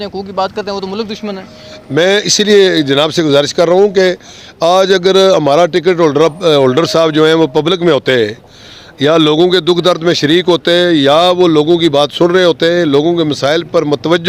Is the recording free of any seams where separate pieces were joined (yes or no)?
yes